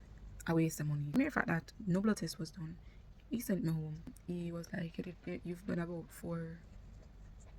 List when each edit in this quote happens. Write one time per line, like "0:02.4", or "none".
0:01.0
0:04.2